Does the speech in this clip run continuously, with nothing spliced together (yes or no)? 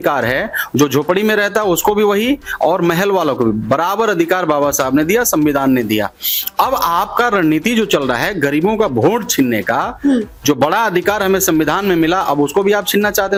yes